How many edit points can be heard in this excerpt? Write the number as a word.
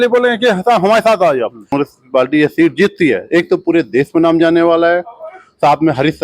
one